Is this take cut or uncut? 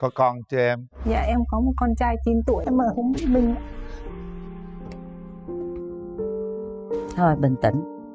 cut